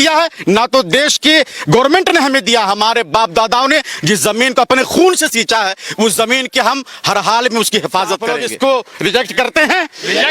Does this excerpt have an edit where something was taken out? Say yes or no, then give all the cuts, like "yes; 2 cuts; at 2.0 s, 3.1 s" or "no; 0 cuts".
yes; 1 cut; at 8.3 s